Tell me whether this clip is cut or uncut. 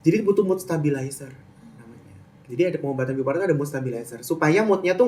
uncut